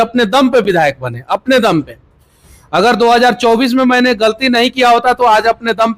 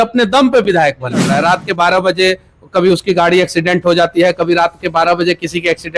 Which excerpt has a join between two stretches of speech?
second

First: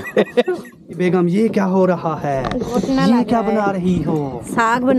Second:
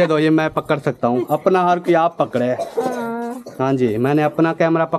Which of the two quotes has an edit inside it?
first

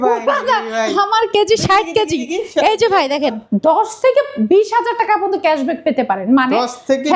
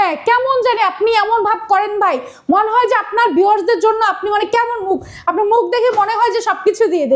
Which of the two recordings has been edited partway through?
first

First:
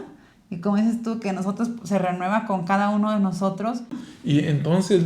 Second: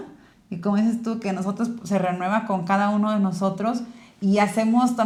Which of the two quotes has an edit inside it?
first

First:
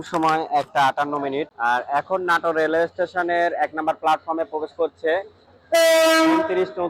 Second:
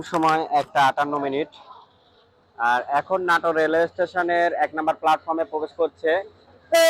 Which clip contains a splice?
first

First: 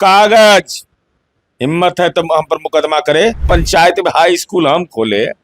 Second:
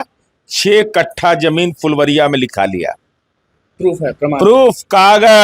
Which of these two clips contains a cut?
first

